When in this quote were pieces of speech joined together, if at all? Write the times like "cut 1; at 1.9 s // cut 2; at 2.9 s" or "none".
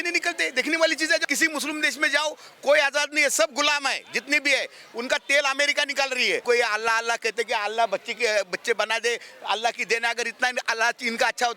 cut 1; at 1.2 s // cut 2; at 6.4 s